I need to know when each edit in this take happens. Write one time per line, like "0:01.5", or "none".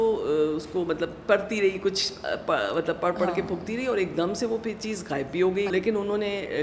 0:05.7